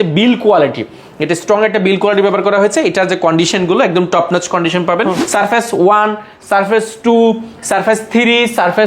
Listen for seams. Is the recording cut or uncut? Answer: cut